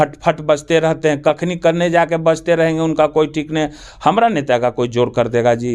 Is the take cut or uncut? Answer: uncut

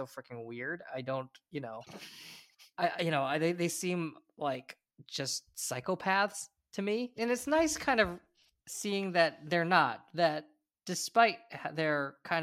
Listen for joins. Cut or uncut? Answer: uncut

